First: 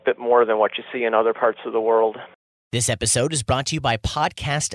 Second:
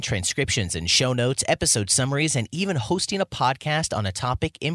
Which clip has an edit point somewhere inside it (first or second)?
first